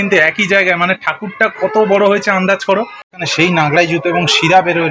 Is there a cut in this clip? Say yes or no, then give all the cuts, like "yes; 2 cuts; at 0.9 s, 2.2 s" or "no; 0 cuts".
yes; 1 cut; at 3.2 s